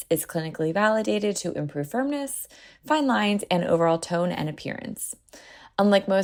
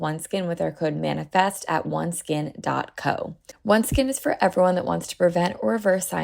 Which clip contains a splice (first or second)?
second